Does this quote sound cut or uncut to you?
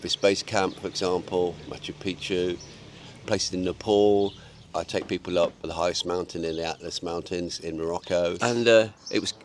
cut